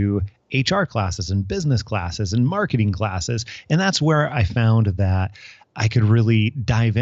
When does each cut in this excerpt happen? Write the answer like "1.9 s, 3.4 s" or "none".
none